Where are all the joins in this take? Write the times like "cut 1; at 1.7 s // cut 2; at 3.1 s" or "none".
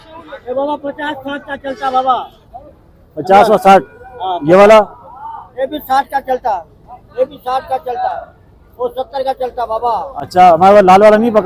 none